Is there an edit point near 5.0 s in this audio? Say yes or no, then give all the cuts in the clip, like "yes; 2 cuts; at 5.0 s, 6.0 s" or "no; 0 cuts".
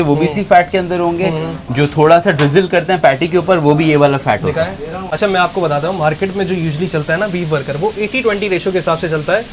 yes; 1 cut; at 5.0 s